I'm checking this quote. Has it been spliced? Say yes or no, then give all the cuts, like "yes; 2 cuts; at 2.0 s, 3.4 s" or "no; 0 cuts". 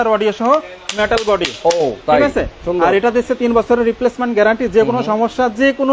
no; 0 cuts